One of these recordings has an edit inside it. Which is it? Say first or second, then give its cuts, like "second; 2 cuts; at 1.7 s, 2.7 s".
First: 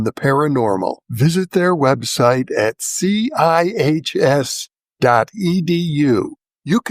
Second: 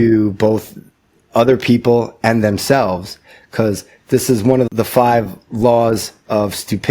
second; 1 cut; at 4.7 s